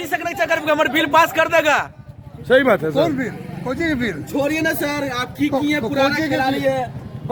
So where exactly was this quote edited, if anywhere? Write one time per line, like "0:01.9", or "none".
none